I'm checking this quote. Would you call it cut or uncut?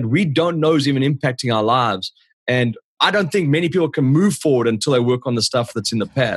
uncut